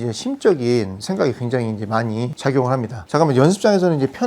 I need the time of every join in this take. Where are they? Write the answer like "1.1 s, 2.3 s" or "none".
2.7 s